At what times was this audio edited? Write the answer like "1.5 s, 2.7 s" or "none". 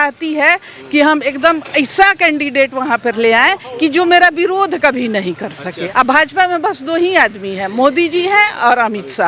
5.8 s